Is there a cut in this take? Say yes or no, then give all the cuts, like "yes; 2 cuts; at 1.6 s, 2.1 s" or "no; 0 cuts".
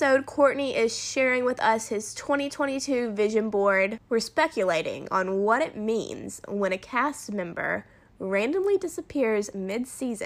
yes; 1 cut; at 4.0 s